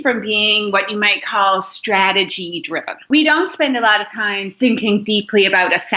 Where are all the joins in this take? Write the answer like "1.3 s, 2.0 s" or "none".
3.1 s, 4.5 s